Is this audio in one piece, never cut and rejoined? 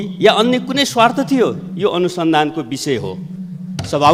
yes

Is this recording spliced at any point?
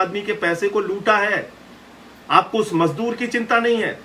no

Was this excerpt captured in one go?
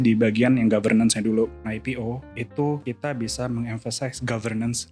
no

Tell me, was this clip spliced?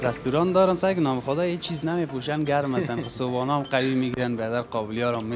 no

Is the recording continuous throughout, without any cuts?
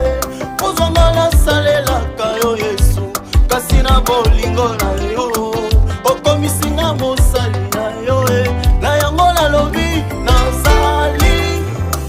yes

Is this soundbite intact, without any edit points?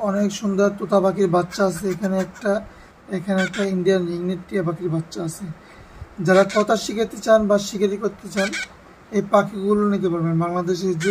yes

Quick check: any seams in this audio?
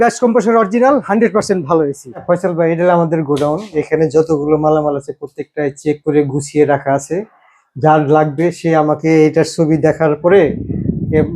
yes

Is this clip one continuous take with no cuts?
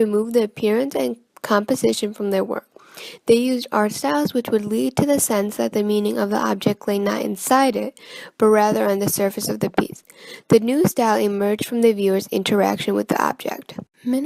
no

